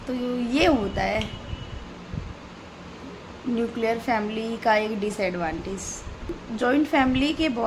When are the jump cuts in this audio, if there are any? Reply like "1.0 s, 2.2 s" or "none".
6.4 s

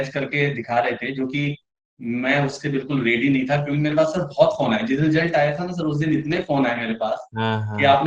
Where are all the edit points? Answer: none

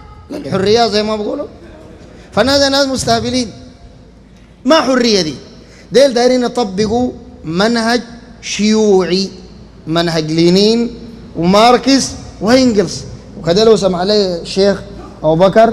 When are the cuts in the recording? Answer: none

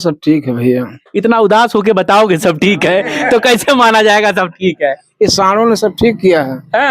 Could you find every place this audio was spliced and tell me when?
1.0 s

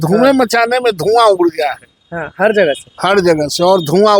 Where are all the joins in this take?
none

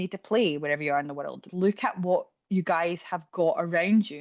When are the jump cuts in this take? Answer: 1.4 s

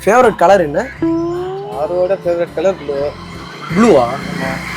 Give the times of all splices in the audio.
0.9 s

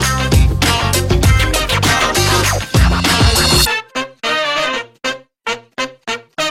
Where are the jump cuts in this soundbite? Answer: none

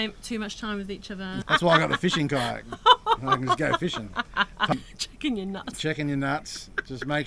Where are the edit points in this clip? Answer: 1.4 s, 4.7 s

